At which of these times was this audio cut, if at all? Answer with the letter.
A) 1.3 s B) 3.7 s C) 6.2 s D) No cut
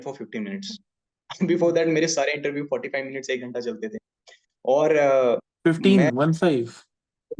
D